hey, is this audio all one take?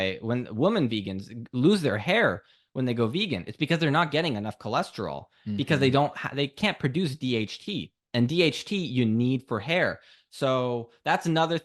yes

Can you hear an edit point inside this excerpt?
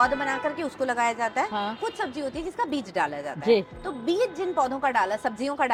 no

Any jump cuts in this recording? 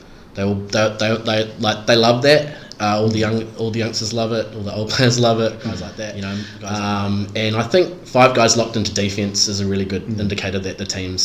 yes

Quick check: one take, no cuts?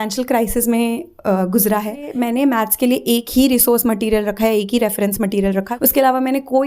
no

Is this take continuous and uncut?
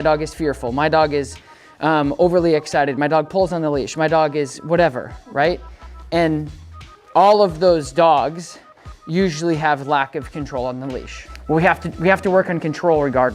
no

